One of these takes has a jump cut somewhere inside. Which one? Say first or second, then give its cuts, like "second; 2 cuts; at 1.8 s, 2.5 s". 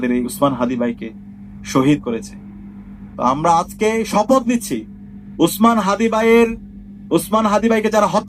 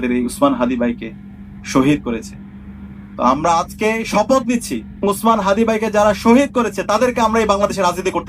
second; 1 cut; at 5.0 s